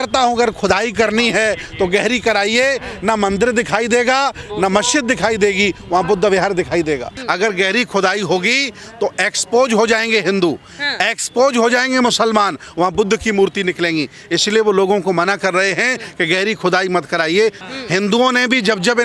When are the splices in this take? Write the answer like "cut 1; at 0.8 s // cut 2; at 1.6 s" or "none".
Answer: cut 1; at 7.1 s // cut 2; at 17.6 s

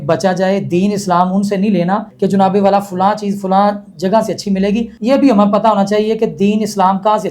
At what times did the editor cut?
cut 1; at 2.1 s // cut 2; at 4.9 s

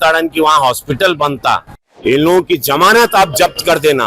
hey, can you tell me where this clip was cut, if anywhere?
cut 1; at 1.8 s

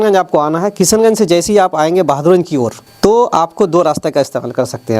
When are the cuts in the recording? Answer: cut 1; at 2.8 s

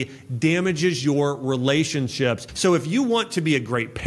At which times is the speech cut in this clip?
cut 1; at 2.5 s

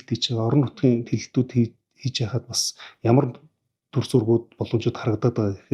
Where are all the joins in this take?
none

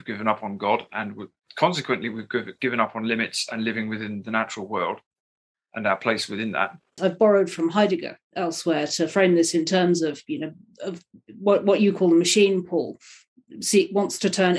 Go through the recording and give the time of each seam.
cut 1; at 7.0 s

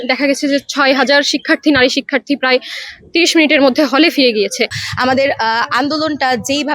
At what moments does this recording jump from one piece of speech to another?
cut 1; at 4.8 s

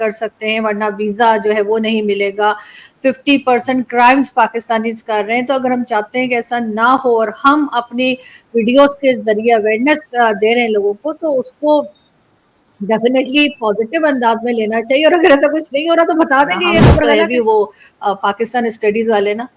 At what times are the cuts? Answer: cut 1; at 17.1 s

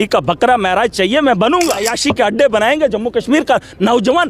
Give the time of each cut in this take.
cut 1; at 1.9 s

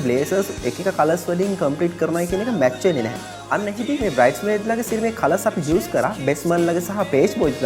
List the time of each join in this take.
none

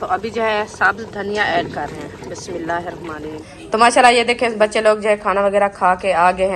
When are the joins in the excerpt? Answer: cut 1; at 3.4 s

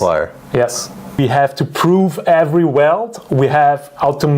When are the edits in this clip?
cut 1; at 1.2 s

